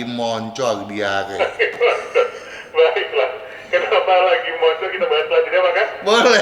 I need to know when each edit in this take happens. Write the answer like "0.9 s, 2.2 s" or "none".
none